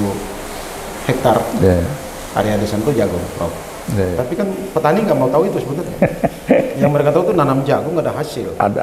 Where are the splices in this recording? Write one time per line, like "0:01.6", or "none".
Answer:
0:04.1

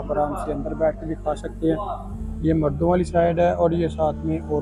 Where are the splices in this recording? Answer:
none

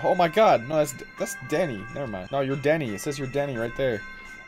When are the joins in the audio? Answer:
0:02.2

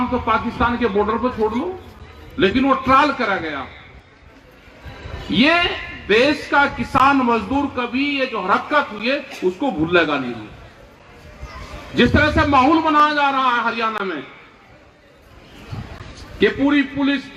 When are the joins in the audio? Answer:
none

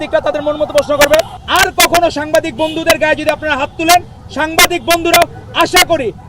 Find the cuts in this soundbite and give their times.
0:01.4

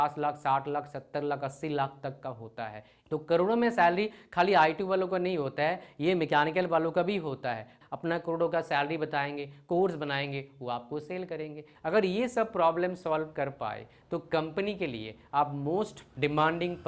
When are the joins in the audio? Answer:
0:02.9
0:07.7
0:11.6

